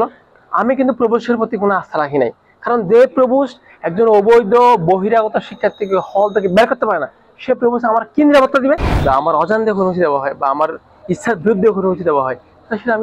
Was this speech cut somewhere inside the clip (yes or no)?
yes